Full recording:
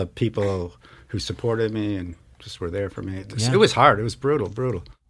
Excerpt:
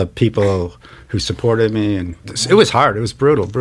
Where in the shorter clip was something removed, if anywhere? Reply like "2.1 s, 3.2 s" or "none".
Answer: 2.3 s